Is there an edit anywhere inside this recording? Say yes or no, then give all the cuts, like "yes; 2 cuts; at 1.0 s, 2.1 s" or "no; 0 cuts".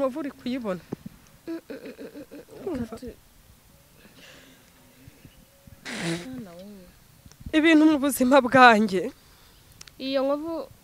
no; 0 cuts